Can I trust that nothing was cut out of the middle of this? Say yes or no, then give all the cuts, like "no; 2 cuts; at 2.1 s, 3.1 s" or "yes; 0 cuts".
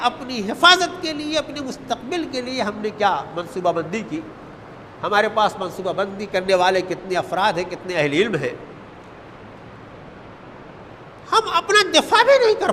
yes; 0 cuts